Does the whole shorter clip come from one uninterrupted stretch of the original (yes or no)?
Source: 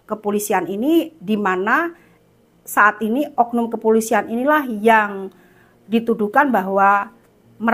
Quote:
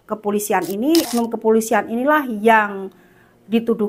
no